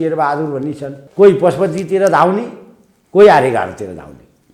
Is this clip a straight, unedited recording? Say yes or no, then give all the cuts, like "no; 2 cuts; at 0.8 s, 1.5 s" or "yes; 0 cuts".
no; 1 cut; at 0.9 s